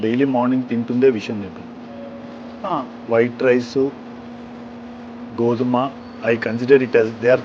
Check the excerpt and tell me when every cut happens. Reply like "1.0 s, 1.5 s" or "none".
none